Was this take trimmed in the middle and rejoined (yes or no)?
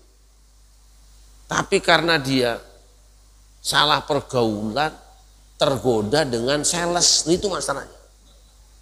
no